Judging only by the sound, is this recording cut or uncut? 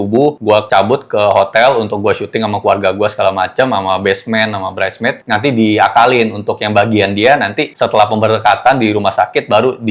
uncut